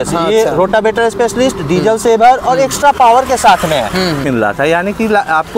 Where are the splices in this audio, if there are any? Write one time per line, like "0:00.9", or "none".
0:04.2